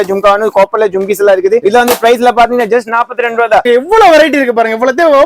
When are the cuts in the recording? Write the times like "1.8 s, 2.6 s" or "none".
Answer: 1.6 s, 3.6 s